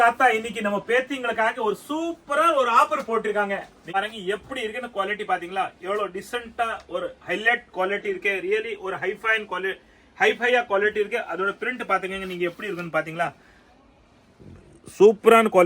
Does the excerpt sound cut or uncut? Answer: cut